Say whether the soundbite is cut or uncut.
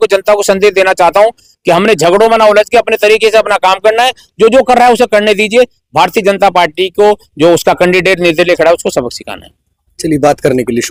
uncut